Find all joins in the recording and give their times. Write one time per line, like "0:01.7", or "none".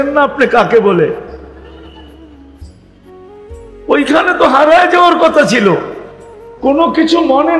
0:01.4
0:03.6